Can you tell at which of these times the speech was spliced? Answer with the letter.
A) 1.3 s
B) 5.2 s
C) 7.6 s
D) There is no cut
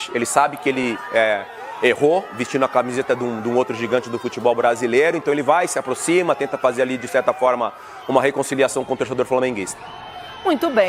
D